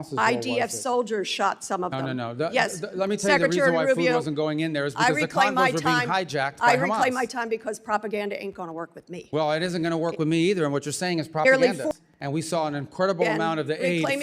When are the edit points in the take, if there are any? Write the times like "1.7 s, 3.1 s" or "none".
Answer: 11.9 s